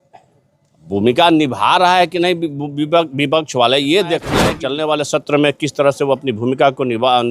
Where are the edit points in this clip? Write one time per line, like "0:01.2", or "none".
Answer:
0:04.4